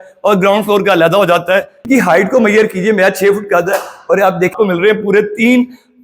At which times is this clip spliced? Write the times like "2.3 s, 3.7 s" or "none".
1.9 s, 4.5 s